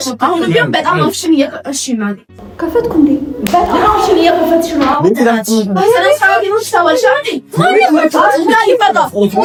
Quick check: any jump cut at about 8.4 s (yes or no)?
no